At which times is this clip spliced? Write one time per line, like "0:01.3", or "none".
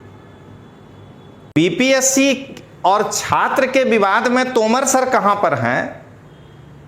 0:01.5